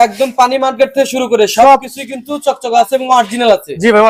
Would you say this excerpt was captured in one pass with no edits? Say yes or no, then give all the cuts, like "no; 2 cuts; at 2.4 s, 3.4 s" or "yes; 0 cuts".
yes; 0 cuts